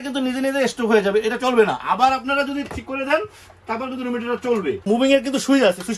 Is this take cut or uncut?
cut